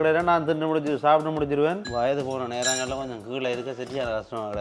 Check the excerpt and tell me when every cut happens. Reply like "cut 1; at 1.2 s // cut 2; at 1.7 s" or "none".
cut 1; at 1.8 s